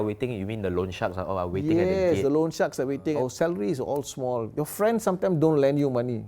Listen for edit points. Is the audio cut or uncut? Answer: cut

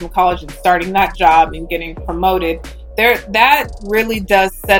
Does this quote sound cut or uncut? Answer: uncut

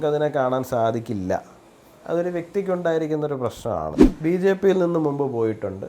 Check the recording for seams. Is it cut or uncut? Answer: cut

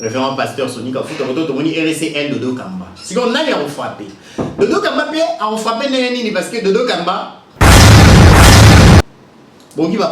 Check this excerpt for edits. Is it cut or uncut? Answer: cut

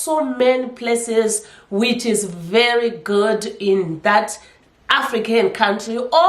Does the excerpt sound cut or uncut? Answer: uncut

